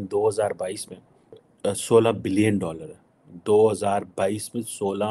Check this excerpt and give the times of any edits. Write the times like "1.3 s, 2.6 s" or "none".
1.5 s